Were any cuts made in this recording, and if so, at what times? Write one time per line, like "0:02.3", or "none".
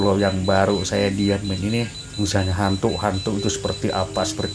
0:02.0